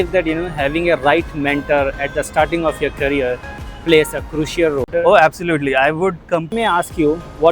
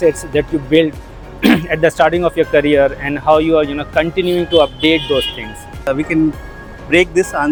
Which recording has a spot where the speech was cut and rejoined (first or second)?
first